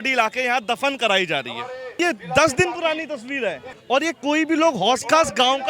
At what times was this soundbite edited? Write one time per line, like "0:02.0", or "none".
0:02.0
0:03.7